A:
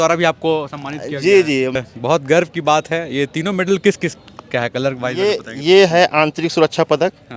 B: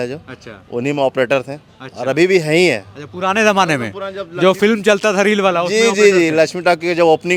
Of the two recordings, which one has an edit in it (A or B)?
A